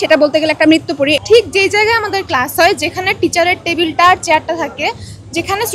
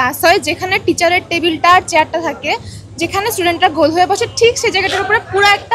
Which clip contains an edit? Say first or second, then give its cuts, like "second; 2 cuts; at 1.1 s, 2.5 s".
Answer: first; 1 cut; at 1.2 s